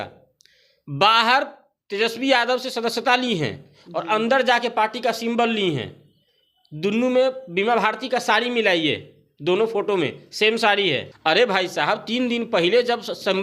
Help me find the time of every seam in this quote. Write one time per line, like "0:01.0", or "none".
0:11.1